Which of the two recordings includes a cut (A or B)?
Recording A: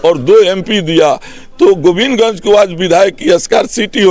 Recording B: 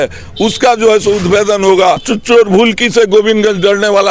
B